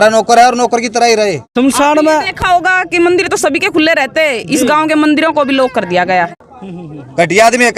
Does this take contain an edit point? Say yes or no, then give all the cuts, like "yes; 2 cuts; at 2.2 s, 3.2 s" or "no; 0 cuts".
yes; 2 cuts; at 1.4 s, 6.4 s